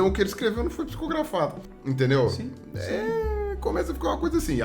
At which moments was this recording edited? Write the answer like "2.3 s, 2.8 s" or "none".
1.7 s